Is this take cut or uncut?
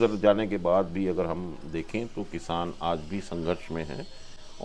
uncut